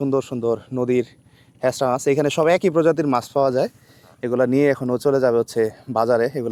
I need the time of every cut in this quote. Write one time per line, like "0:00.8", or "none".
none